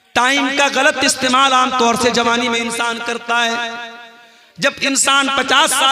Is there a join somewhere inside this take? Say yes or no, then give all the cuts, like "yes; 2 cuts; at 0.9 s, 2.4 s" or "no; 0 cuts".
no; 0 cuts